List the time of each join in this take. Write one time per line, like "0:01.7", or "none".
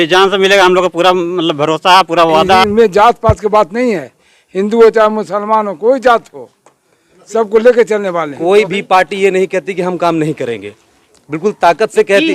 0:02.7
0:08.3